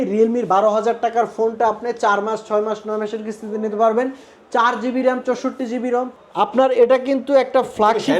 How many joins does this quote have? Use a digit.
1